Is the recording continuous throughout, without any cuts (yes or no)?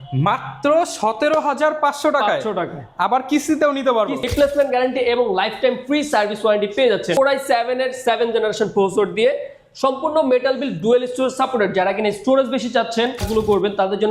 no